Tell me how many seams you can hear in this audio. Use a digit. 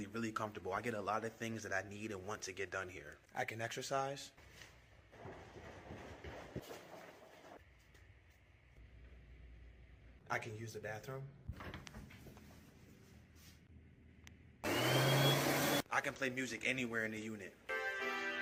0